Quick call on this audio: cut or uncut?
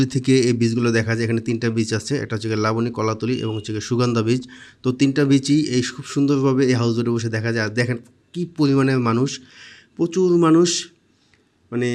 uncut